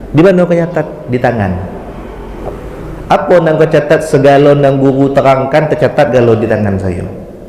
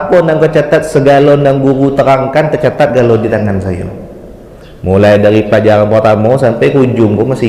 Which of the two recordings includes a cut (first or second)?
first